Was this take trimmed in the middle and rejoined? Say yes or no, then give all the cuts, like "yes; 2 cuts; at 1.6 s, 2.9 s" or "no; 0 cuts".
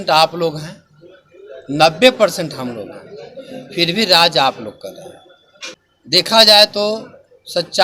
yes; 1 cut; at 5.8 s